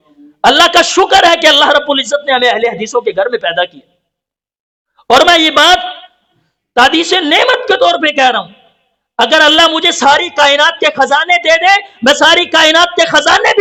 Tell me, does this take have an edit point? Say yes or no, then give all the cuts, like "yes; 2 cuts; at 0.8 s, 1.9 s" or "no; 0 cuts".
no; 0 cuts